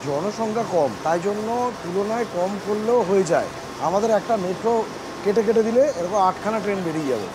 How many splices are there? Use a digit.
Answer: 2